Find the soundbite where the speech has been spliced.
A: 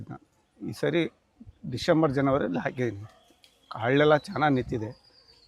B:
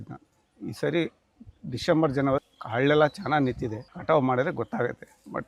B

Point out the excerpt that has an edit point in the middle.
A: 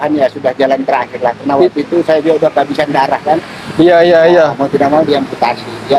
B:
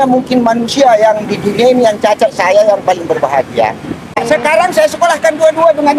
B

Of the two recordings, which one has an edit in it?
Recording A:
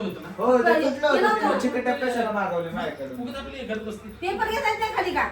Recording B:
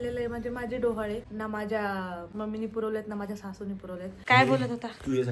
B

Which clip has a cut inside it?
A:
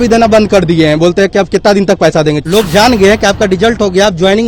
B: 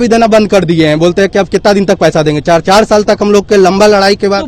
A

